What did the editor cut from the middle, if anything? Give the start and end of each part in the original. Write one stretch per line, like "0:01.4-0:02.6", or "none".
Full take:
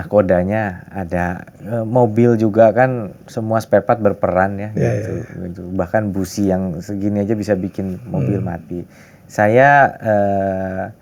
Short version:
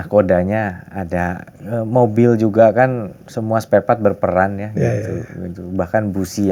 none